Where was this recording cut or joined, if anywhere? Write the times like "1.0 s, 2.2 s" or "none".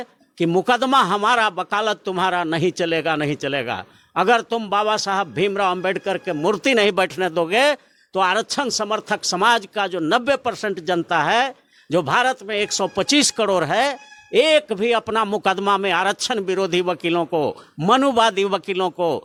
none